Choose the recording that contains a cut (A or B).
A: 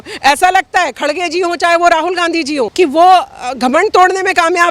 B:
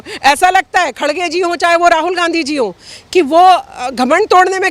A